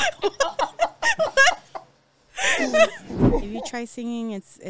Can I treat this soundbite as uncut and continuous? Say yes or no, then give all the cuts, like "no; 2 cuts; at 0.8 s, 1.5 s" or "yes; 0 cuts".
no; 1 cut; at 3.1 s